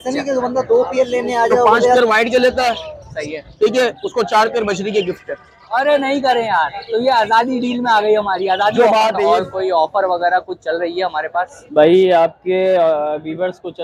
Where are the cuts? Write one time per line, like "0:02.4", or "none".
0:02.0
0:09.3